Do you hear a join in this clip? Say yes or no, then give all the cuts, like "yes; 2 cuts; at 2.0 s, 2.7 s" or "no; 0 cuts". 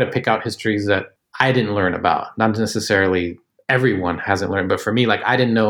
yes; 1 cut; at 1.1 s